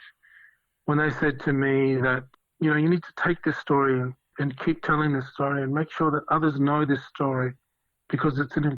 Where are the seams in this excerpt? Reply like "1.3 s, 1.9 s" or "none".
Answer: 2.3 s

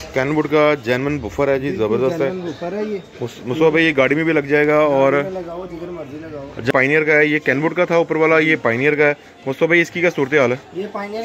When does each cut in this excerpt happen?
6.7 s

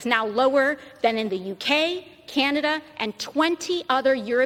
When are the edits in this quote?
none

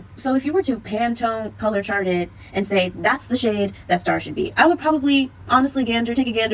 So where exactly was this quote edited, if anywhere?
none

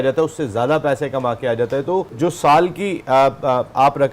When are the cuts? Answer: 2.1 s

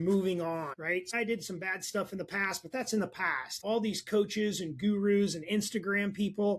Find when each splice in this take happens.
1.1 s, 3.5 s

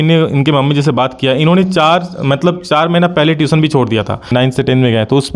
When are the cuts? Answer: 4.3 s

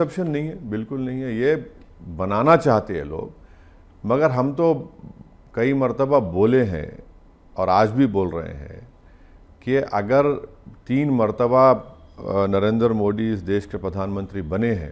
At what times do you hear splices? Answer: none

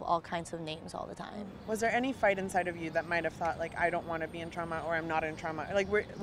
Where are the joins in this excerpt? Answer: none

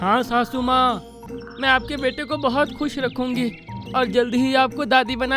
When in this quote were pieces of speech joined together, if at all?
1.3 s

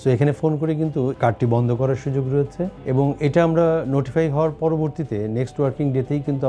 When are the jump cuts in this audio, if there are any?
1.1 s, 2.8 s

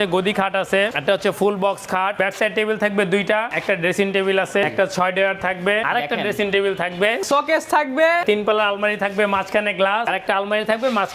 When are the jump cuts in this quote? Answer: 0.9 s, 2.2 s, 3.5 s, 4.7 s, 5.8 s, 7.2 s, 8.2 s, 10.1 s

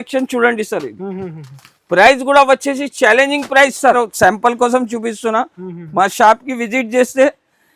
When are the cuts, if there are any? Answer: 3.9 s

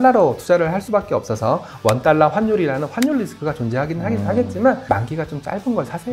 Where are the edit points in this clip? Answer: 4.8 s

